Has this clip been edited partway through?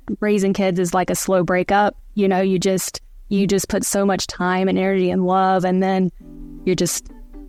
no; 0 cuts

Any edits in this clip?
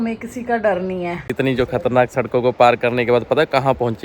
yes; 1 cut; at 1.3 s

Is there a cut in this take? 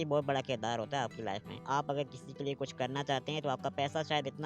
yes; 1 cut; at 1.7 s

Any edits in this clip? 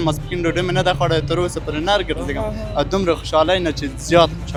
no; 0 cuts

